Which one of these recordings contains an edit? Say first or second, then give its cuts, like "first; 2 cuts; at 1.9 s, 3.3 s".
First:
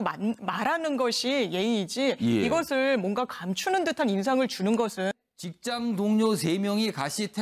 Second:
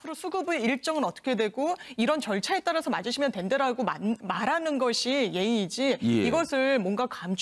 first; 1 cut; at 5.1 s